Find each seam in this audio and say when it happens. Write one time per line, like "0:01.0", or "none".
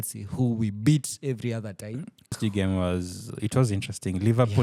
0:02.4